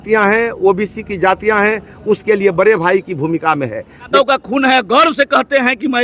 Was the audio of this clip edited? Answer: yes; 1 cut; at 4.1 s

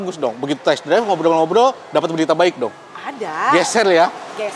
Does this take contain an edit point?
no; 0 cuts

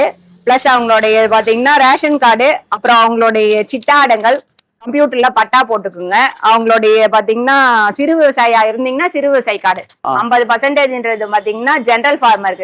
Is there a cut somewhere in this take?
yes; 1 cut; at 10.1 s

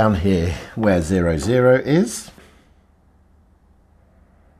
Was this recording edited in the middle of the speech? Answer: yes; 1 cut; at 2.4 s

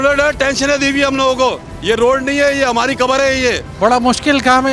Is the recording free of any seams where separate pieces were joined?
no; 2 cuts; at 1.7 s, 3.7 s

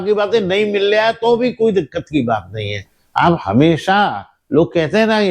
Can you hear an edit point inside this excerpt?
no; 0 cuts

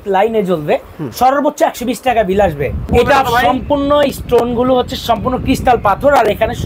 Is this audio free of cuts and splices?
no; 1 cut; at 2.8 s

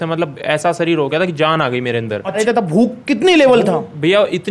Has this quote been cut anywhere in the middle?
yes; 1 cut; at 2.4 s

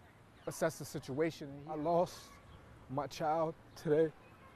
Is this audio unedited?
no; 1 cut; at 1.5 s

